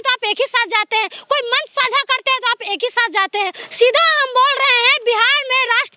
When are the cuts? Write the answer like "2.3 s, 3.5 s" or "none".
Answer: 3.6 s